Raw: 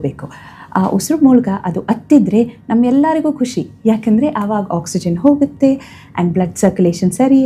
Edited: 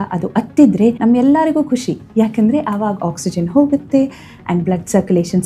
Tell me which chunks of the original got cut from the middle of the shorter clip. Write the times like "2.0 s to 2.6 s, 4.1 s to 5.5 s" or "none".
2.5 s to 2.7 s

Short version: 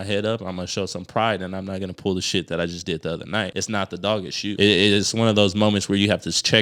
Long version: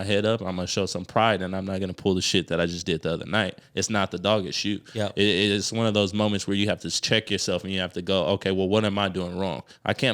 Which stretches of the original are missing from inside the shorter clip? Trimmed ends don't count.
3.5 s to 3.8 s, 4.8 s to 5.1 s

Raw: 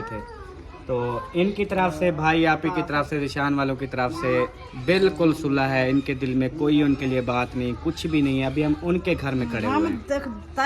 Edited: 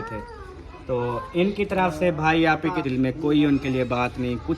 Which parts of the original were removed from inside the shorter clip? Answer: 2.8 s to 6.2 s

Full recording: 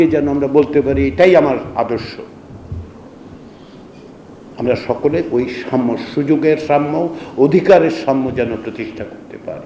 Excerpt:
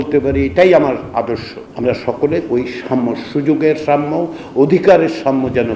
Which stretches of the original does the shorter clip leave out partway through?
2.2 s to 4.4 s

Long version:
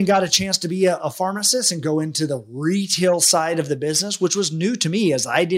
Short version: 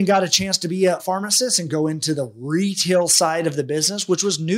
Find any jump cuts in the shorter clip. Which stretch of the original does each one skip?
1.0 s to 1.1 s

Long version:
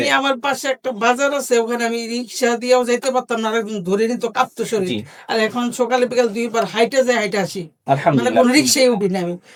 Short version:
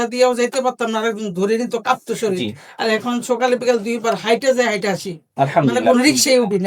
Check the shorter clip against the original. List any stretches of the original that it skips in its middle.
none

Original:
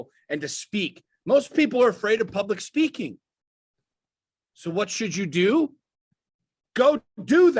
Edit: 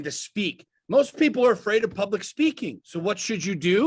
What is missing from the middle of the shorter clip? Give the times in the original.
3.2 s to 4.5 s

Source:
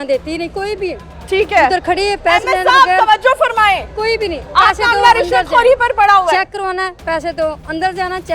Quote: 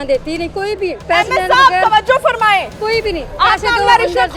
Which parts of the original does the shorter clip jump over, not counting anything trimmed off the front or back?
1.0 s to 2.2 s

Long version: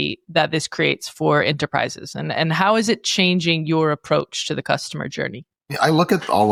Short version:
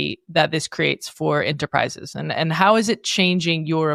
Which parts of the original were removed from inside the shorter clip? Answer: none

